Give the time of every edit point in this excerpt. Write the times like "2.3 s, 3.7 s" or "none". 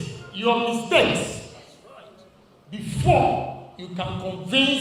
none